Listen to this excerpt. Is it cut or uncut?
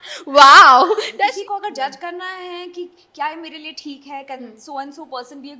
cut